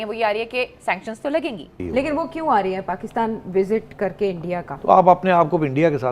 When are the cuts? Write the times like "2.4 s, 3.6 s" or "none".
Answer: 1.8 s, 4.7 s

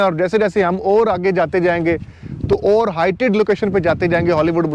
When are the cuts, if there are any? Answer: none

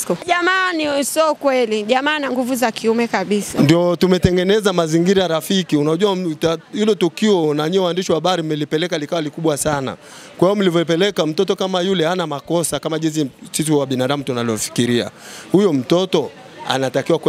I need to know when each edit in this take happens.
3.5 s

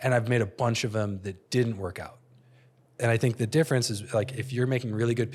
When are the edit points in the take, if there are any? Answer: none

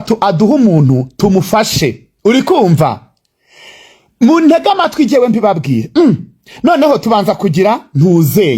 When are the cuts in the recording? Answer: none

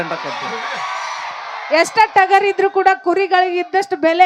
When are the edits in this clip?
none

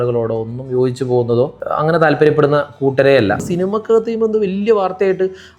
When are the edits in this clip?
1.6 s, 3.5 s

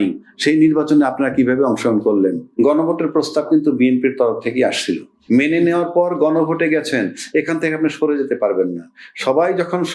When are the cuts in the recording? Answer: 2.5 s, 5.1 s

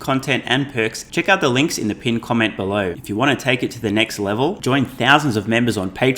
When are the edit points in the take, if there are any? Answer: 1.0 s, 3.0 s

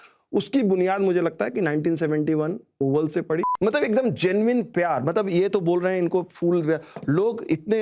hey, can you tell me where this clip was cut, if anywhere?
3.5 s

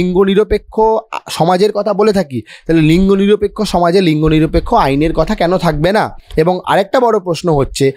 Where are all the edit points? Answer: none

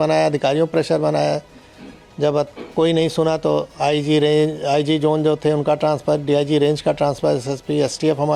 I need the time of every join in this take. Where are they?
none

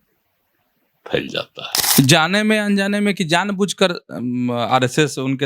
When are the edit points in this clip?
1.8 s

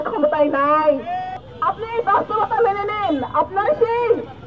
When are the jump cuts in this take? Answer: 1.3 s

